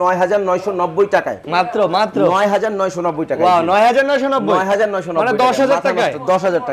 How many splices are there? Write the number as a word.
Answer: zero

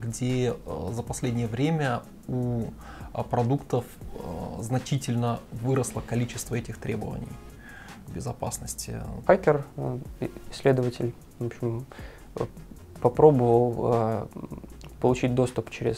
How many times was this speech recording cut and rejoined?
one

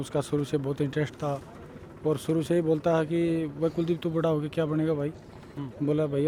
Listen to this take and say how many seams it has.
zero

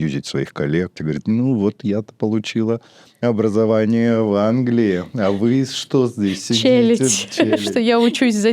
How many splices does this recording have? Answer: two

